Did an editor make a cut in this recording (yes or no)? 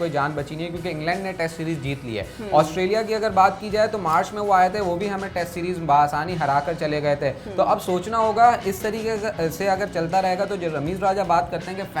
no